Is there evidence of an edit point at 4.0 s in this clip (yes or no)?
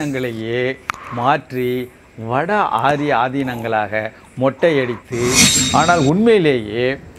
no